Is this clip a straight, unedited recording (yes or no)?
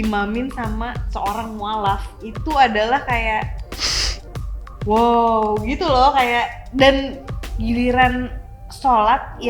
no